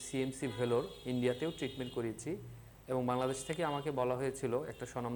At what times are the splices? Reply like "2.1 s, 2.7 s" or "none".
none